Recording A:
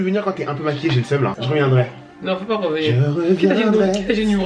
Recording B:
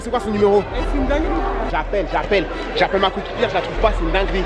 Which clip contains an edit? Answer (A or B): A